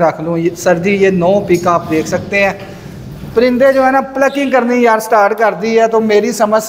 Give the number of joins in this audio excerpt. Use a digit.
0